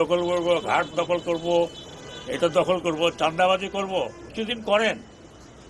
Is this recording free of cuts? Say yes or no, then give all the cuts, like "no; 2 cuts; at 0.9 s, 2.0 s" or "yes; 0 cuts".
no; 1 cut; at 4.2 s